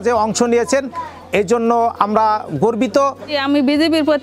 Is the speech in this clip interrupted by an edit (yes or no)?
yes